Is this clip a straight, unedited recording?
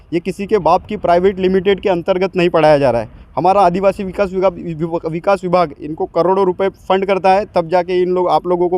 yes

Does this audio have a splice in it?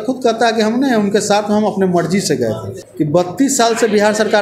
yes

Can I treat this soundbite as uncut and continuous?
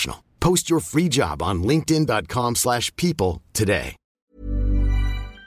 no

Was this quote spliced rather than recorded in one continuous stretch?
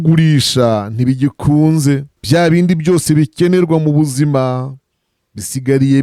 yes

